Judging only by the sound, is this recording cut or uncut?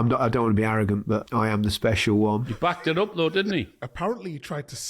cut